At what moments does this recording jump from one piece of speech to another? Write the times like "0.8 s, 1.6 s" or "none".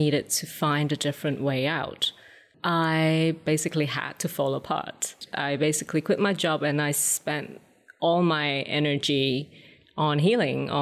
2.4 s, 3.4 s, 5.2 s

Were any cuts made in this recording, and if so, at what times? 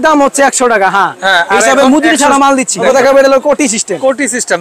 2.8 s

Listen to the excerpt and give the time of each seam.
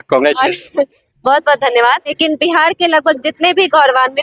2.2 s

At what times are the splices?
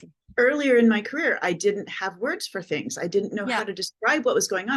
none

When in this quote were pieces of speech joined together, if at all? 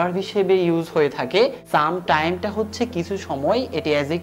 1.6 s

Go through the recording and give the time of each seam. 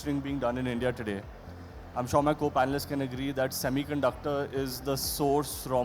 none

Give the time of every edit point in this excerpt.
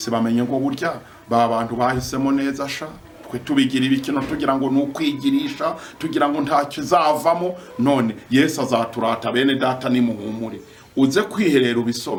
none

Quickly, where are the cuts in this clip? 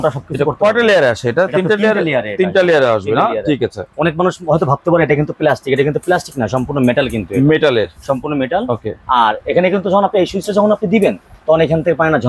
none

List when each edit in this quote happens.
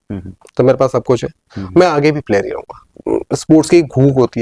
3.0 s

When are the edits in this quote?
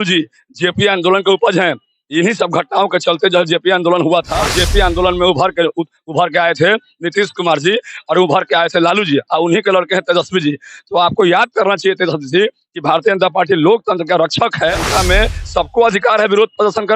4.4 s, 14.8 s

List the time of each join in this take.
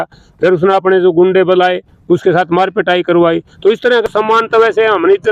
4.1 s

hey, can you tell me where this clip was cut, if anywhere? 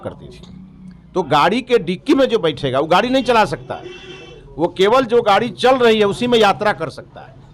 none

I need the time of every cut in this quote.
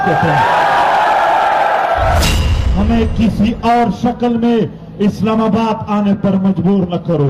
2.2 s

